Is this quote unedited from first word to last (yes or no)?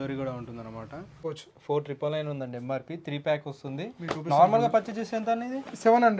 no